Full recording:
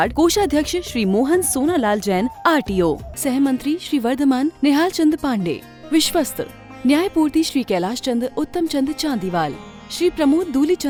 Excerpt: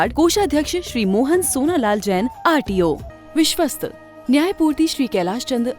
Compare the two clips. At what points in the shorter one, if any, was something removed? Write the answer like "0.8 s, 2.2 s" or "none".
3.1 s